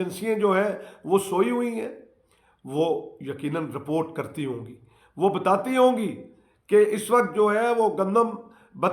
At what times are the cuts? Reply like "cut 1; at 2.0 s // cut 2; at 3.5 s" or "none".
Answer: none